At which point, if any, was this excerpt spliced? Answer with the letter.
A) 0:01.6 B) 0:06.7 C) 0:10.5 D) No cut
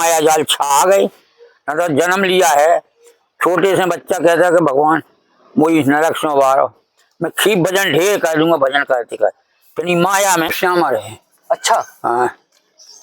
C